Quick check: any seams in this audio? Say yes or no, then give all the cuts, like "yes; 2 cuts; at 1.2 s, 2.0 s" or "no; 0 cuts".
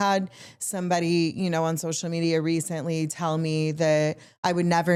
no; 0 cuts